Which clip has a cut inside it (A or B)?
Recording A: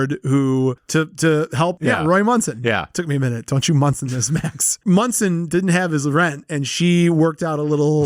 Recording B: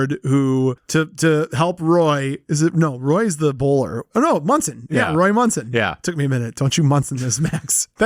A